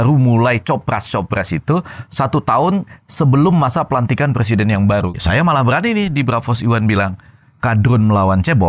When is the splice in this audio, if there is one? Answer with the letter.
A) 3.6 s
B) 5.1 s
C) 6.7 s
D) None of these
B